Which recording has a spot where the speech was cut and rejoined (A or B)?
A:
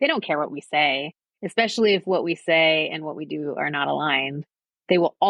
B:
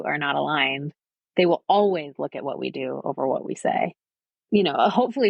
B